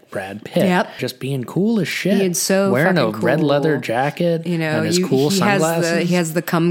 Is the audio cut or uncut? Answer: cut